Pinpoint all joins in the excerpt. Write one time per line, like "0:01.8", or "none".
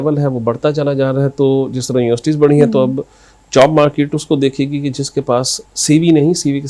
none